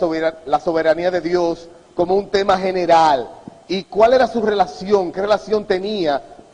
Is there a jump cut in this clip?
no; 0 cuts

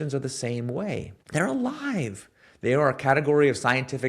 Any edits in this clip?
yes; 1 cut; at 1.1 s

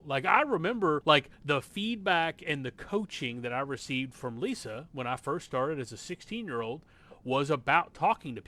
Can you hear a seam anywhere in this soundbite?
yes; 1 cut; at 1.0 s

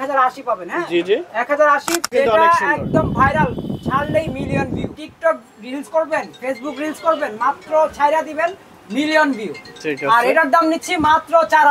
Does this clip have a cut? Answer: yes; 2 cuts; at 2.1 s, 4.9 s

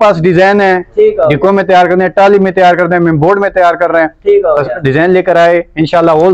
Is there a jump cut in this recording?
no; 0 cuts

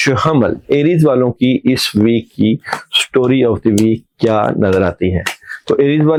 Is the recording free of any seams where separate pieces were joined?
yes; 0 cuts

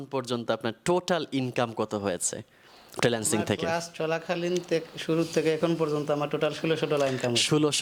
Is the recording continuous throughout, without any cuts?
yes; 0 cuts

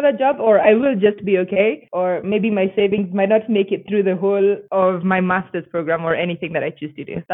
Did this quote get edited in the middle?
no; 0 cuts

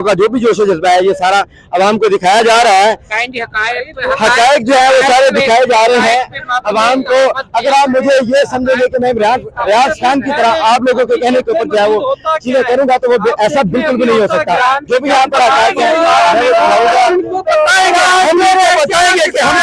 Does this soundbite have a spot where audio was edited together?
no; 0 cuts

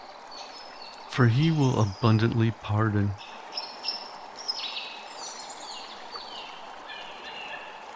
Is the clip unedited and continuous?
no; 2 cuts; at 1.1 s, 3.1 s

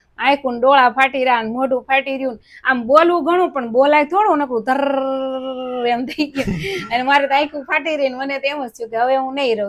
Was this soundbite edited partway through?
no; 0 cuts

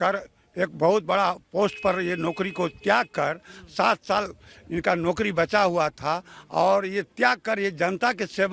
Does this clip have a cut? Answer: no; 0 cuts

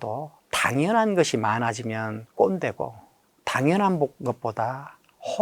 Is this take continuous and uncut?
no; 1 cut; at 2.2 s

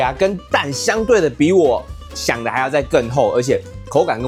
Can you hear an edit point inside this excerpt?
no; 0 cuts

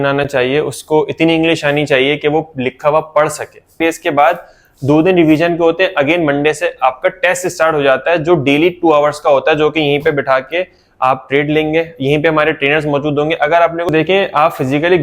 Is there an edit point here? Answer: yes; 2 cuts; at 3.8 s, 13.9 s

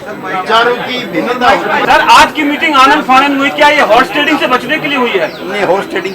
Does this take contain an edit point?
yes; 1 cut; at 1.8 s

